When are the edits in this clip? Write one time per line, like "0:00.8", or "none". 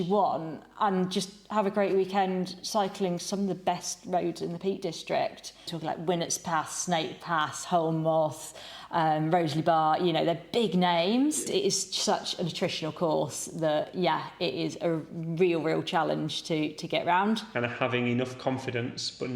0:05.7
0:11.5
0:17.5